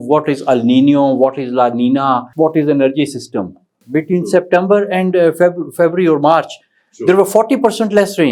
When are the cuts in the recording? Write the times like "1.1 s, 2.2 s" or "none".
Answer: 2.3 s, 3.8 s